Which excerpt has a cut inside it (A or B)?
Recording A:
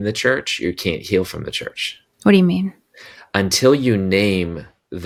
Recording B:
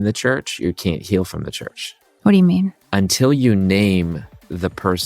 B